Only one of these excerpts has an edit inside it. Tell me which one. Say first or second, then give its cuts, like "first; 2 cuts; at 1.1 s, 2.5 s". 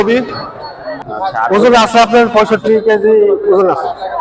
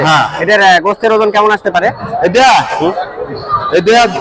first; 1 cut; at 1.0 s